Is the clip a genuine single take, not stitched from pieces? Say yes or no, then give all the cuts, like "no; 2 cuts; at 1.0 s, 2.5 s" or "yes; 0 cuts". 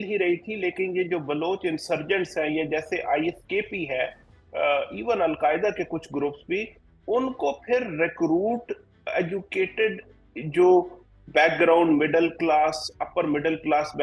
yes; 0 cuts